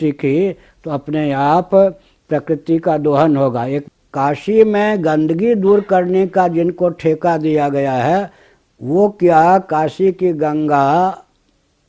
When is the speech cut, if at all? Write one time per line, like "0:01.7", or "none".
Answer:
0:03.8